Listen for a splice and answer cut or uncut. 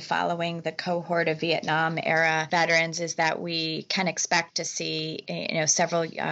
cut